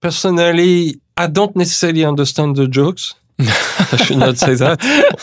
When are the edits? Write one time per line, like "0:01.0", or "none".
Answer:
0:01.0